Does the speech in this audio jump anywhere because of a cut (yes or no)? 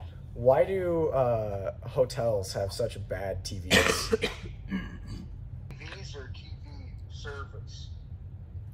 yes